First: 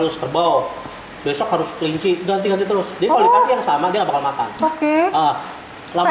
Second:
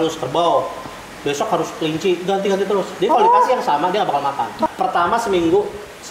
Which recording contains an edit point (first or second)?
second